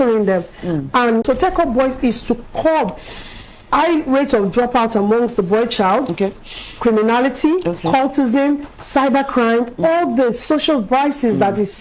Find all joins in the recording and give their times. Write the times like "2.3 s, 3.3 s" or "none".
1.2 s